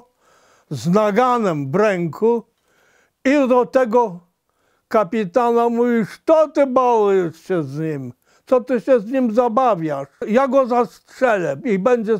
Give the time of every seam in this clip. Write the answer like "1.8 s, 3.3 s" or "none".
10.2 s